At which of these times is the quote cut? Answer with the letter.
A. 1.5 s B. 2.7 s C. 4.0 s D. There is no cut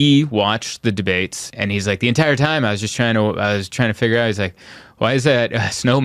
A